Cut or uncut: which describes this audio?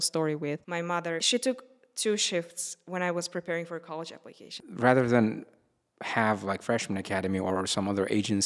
cut